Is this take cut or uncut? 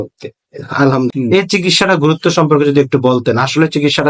cut